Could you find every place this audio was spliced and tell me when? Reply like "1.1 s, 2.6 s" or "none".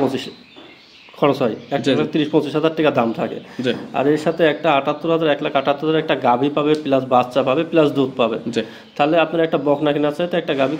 none